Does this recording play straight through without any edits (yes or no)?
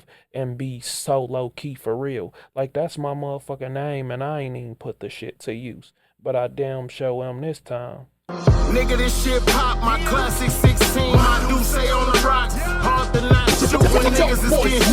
no